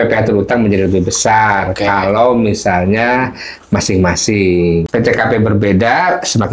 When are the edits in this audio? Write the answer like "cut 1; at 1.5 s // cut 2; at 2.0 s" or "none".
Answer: cut 1; at 4.9 s